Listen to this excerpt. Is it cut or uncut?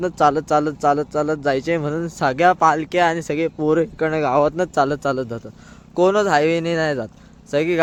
uncut